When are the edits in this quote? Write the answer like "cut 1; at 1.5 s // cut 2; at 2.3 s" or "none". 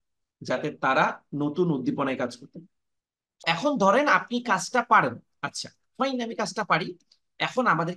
cut 1; at 3.4 s